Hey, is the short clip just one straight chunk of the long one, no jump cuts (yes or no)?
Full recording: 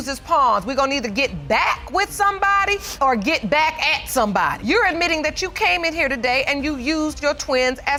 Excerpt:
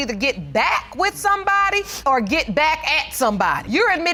yes